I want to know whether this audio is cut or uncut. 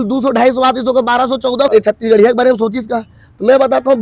cut